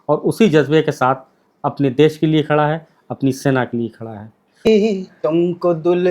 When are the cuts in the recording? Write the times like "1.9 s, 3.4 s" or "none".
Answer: 4.7 s